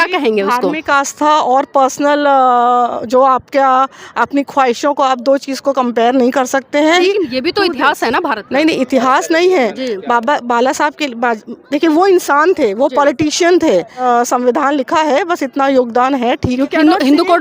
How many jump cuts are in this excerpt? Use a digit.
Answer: 3